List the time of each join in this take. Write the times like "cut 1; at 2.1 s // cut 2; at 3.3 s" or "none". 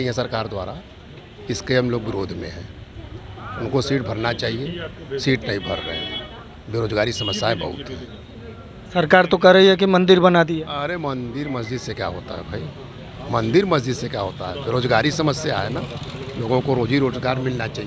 none